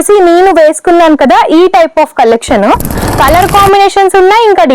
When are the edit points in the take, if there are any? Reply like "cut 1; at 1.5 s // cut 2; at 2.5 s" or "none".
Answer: cut 1; at 3.0 s